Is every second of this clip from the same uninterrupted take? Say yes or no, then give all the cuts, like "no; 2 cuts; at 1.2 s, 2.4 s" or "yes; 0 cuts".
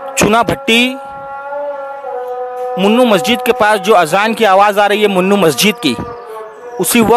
yes; 0 cuts